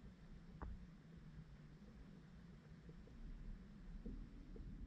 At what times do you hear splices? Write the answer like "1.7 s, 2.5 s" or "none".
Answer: none